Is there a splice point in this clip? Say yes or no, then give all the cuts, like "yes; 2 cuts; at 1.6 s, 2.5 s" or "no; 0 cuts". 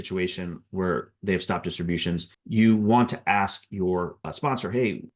no; 0 cuts